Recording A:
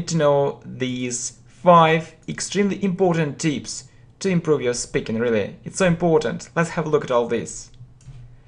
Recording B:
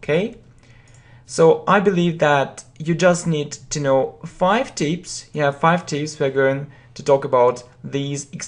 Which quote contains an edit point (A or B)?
B